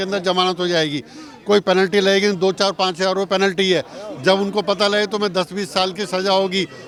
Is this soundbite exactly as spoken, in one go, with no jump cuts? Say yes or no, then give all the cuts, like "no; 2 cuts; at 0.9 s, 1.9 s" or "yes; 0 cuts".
yes; 0 cuts